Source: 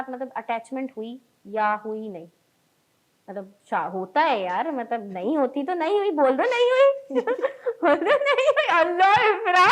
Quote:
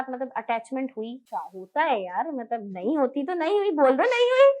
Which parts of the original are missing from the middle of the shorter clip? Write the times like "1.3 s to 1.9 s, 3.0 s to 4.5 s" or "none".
1.2 s to 3.6 s